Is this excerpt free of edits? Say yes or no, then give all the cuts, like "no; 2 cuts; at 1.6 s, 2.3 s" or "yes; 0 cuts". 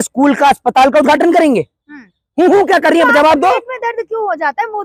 yes; 0 cuts